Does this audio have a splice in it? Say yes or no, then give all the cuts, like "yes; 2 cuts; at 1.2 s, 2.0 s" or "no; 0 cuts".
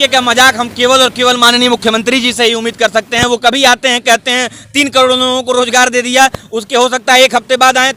no; 0 cuts